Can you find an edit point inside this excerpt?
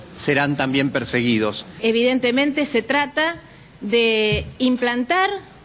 yes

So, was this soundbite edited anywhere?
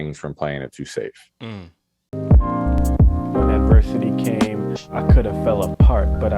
yes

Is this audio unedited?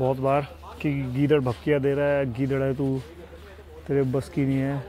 yes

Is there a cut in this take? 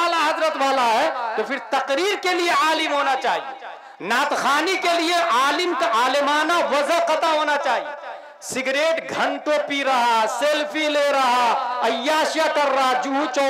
no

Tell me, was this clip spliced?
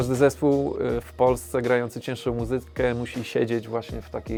no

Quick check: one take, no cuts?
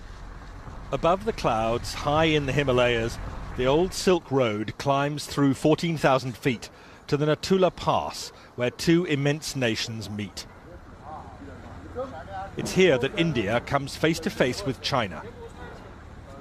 yes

